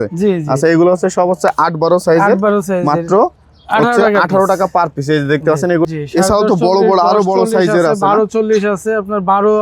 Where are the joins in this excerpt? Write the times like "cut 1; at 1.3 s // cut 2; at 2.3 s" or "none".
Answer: cut 1; at 5.9 s